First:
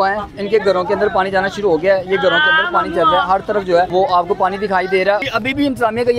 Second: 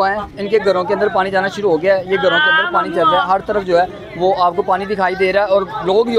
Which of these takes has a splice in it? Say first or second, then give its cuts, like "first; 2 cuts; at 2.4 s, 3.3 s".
first; 2 cuts; at 3.9 s, 5.2 s